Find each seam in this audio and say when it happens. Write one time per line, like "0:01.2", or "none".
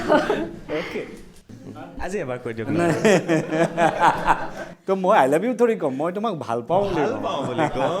0:01.3